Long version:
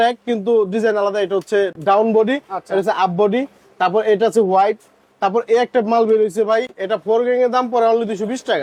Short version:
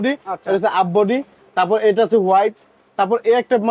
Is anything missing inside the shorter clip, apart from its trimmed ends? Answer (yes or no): no